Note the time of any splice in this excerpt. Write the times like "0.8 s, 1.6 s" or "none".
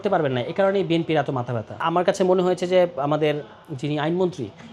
1.8 s